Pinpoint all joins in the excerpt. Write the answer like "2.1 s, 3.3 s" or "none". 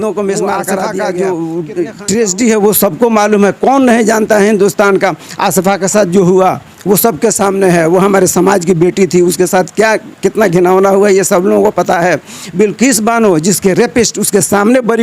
0.9 s